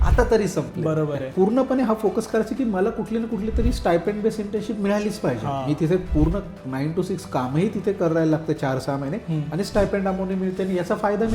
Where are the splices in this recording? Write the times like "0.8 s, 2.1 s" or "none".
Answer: 1.2 s

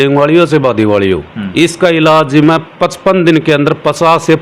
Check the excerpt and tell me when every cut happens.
none

